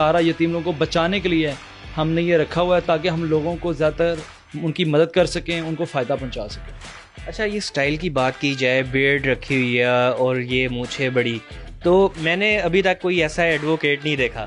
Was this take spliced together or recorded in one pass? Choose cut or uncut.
uncut